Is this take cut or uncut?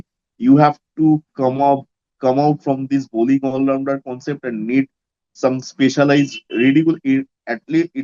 uncut